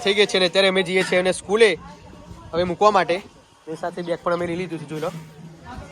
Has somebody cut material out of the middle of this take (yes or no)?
no